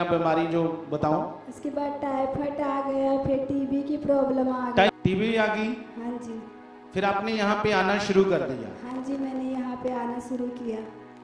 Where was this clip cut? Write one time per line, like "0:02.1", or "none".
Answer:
0:04.9